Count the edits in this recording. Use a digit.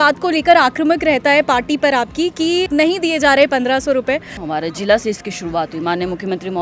2